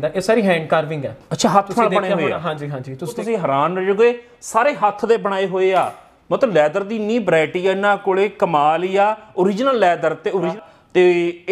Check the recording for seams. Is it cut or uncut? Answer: cut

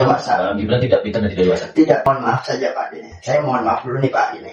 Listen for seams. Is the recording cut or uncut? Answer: cut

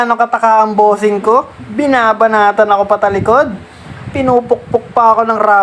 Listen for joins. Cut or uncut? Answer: uncut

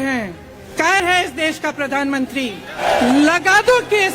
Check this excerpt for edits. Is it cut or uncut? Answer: cut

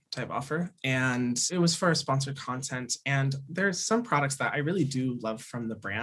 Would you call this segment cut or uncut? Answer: uncut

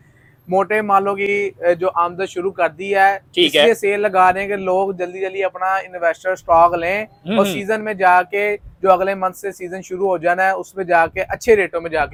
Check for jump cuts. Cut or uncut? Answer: uncut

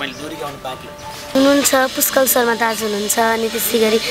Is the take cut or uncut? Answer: cut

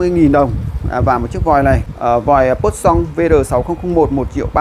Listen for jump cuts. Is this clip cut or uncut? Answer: cut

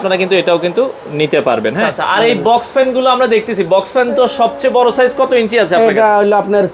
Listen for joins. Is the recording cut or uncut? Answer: cut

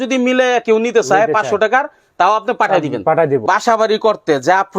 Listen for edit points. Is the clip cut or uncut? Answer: cut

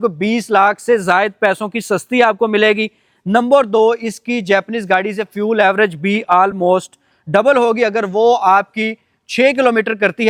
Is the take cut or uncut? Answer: uncut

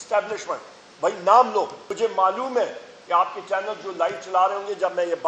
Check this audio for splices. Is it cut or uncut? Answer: cut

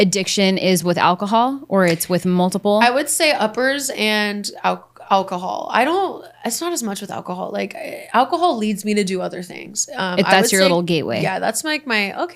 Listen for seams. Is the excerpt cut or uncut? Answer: uncut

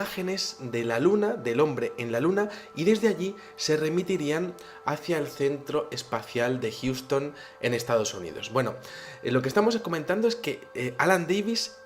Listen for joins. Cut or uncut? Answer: cut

